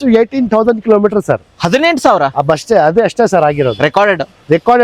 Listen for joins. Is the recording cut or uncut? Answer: uncut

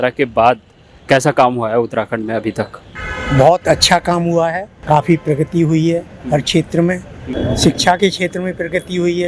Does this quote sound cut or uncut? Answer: cut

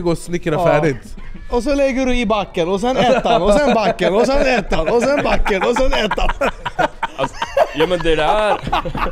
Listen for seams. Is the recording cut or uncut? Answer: uncut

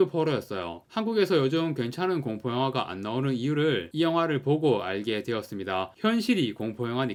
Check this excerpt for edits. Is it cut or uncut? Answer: uncut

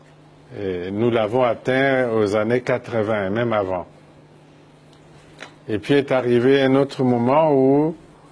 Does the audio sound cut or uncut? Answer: uncut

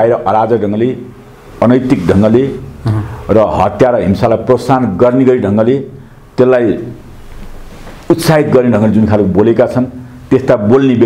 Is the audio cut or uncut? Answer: uncut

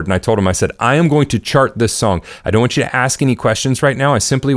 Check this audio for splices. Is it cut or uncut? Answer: uncut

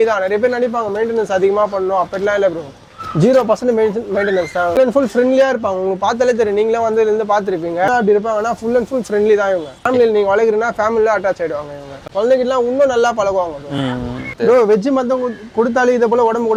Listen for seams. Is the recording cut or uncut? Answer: uncut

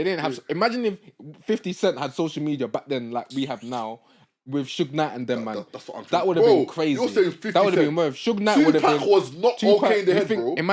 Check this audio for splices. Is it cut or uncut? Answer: uncut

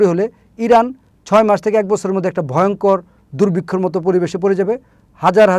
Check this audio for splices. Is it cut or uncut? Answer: uncut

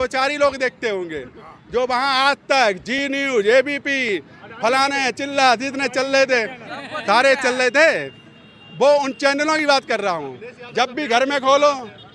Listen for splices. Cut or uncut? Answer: uncut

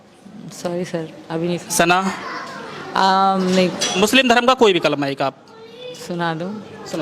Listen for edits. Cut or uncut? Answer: cut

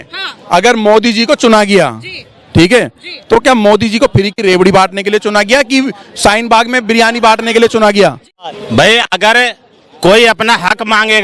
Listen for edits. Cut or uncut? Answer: cut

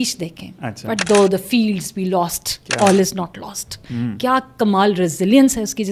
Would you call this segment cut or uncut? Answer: uncut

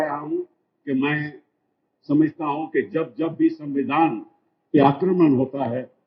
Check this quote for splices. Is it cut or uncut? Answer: uncut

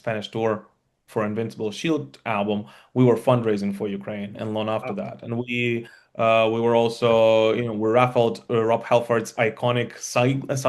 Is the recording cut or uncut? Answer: uncut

